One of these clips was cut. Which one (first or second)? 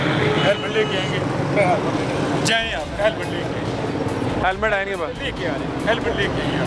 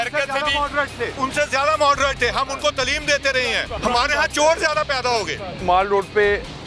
second